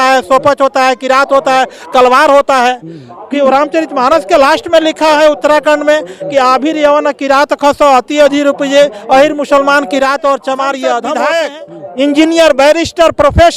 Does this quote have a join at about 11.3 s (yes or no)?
yes